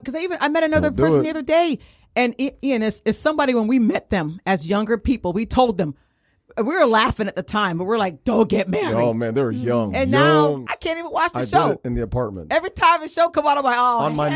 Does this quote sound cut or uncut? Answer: cut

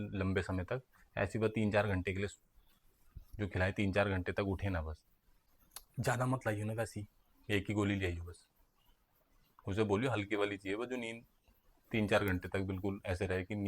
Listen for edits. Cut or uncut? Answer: cut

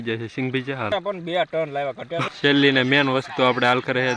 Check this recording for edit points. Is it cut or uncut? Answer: cut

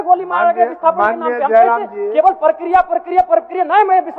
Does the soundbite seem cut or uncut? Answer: uncut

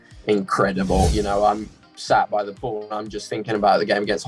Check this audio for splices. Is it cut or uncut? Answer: cut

